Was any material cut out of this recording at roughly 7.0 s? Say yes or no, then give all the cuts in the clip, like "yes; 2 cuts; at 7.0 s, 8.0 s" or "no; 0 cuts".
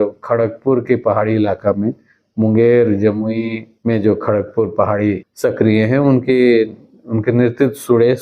no; 2 cuts; at 3.7 s, 5.3 s